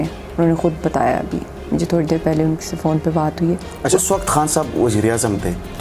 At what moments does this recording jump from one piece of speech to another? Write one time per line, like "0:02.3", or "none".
0:03.9